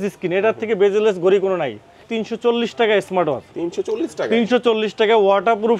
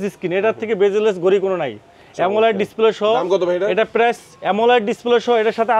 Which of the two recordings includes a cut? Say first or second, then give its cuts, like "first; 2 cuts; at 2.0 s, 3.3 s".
first; 1 cut; at 2.1 s